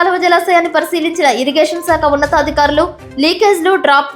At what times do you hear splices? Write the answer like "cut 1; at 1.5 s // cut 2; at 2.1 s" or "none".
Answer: none